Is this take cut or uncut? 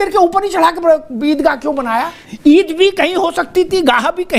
cut